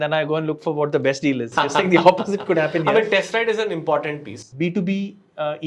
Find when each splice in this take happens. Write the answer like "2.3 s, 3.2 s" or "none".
4.4 s